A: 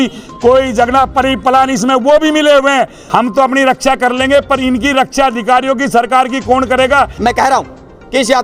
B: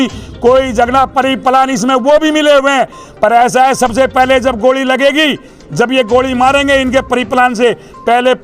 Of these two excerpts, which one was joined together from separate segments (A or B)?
A